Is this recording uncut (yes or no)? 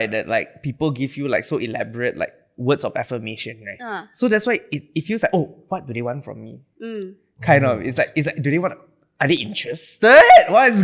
yes